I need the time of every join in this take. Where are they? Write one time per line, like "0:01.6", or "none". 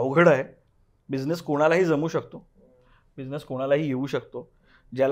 none